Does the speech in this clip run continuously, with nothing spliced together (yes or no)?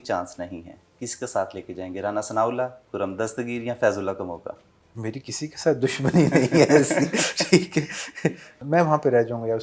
no